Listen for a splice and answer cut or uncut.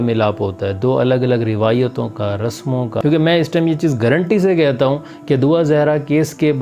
cut